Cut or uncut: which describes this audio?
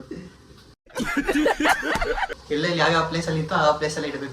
cut